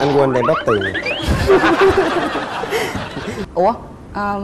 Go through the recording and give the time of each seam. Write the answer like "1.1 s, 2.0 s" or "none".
3.4 s